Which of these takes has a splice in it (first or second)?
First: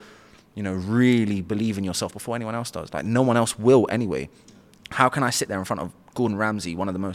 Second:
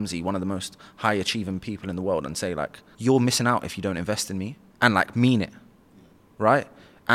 second